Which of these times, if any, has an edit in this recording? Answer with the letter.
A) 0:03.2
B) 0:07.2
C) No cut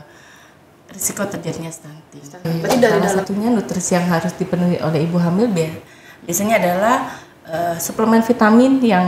A